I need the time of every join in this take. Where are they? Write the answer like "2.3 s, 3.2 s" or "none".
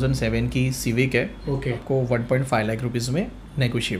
1.8 s